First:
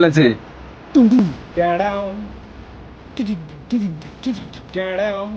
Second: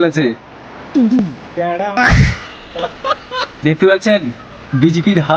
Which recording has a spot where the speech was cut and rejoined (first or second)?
second